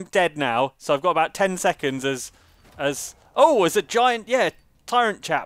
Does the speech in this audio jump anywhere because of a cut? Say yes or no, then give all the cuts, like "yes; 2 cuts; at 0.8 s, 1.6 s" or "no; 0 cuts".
no; 0 cuts